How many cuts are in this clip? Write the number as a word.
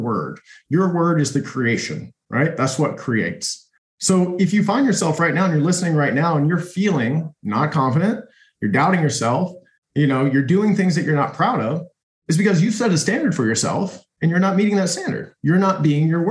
one